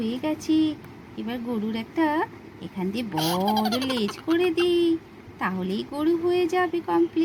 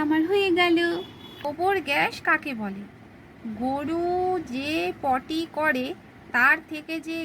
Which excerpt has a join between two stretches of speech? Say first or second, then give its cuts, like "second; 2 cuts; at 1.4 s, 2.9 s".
second; 1 cut; at 1.3 s